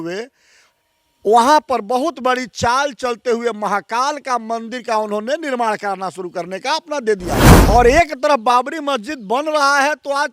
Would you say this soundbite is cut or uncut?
cut